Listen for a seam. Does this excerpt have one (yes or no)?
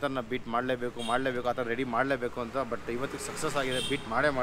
no